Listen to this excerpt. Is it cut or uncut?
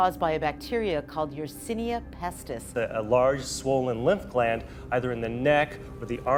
uncut